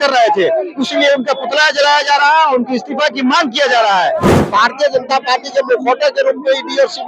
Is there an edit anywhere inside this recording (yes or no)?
yes